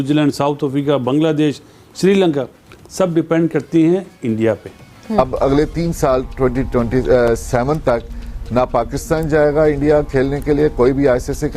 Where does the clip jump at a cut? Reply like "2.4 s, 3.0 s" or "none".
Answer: 5.3 s